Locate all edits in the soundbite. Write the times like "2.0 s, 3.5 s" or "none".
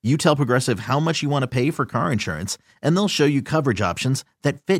none